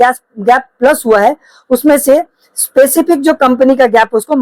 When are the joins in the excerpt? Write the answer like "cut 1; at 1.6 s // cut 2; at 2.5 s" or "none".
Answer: none